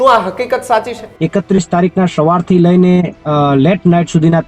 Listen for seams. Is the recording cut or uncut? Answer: cut